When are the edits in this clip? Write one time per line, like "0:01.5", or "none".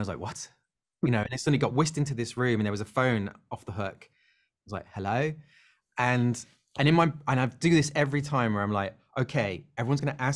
none

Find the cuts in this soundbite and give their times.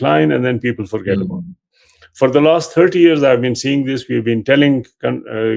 none

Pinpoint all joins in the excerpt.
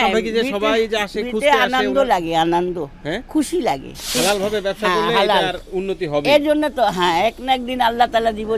0:04.2

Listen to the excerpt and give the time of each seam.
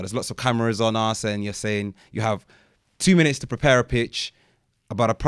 none

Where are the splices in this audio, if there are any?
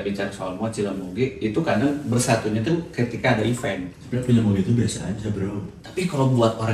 0:03.9

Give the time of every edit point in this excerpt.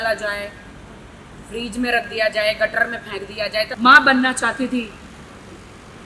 0:03.7

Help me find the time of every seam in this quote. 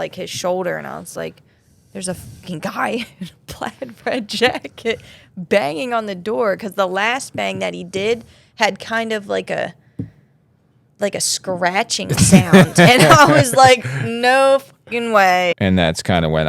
0:15.5

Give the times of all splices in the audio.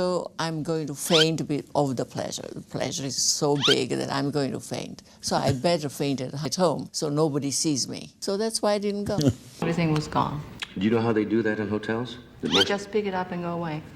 0:09.6

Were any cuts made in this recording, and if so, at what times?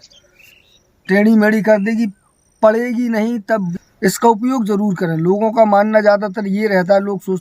0:03.7

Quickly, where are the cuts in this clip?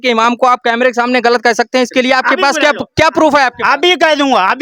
none

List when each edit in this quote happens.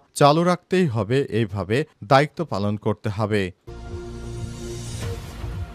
0:03.6

